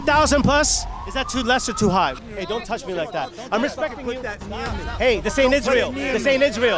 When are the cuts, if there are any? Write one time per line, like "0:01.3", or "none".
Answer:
0:02.1